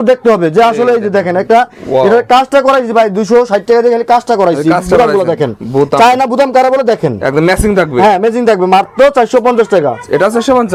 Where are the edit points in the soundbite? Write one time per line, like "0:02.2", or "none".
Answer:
none